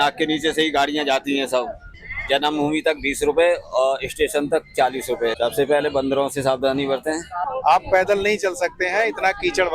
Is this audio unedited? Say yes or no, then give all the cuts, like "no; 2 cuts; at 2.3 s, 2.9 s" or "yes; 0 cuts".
no; 3 cuts; at 1.8 s, 5.3 s, 7.4 s